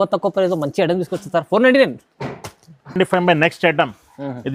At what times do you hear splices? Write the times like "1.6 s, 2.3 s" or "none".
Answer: none